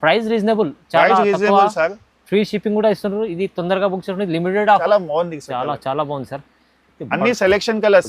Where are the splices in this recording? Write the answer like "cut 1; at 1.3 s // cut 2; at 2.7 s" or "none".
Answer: cut 1; at 4.8 s